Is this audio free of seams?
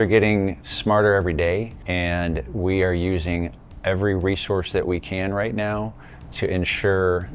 no; 1 cut; at 1.8 s

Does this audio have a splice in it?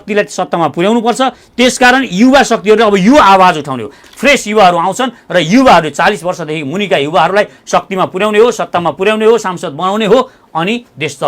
yes; 1 cut; at 4.1 s

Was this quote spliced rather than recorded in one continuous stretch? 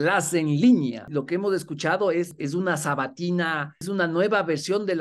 yes; 3 cuts; at 1.1 s, 2.3 s, 3.9 s

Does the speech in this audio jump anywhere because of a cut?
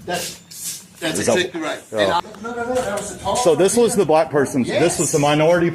yes; 1 cut; at 2.2 s

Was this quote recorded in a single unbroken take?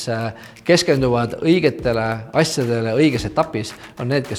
yes; 0 cuts

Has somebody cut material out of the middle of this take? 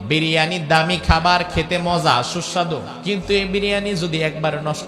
yes; 1 cut; at 2.9 s

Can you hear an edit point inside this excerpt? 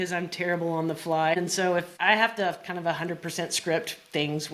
yes; 1 cut; at 1.9 s

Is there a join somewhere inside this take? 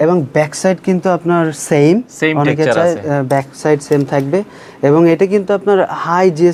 no; 0 cuts

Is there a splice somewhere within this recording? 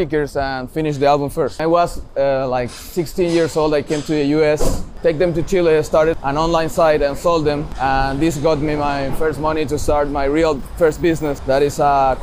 yes; 5 cuts; at 1.6 s, 4.9 s, 6.1 s, 7.7 s, 11.4 s

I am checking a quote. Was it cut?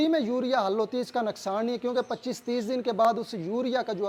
no; 0 cuts

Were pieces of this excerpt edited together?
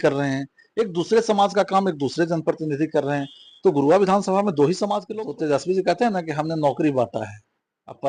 yes; 1 cut; at 5.0 s

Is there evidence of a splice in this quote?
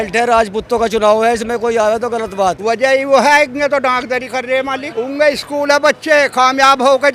yes; 2 cuts; at 2.6 s, 4.9 s

